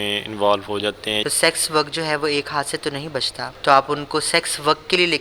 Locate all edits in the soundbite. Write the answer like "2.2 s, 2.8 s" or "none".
1.2 s, 3.5 s